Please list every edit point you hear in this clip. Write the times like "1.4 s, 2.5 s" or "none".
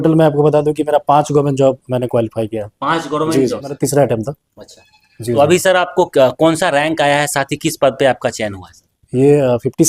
3.6 s